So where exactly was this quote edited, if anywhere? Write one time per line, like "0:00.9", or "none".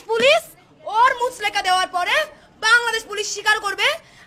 none